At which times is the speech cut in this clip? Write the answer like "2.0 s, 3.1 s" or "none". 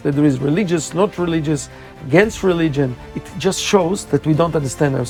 none